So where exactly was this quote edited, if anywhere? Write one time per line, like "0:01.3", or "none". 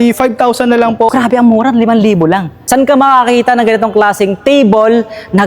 0:01.1
0:02.5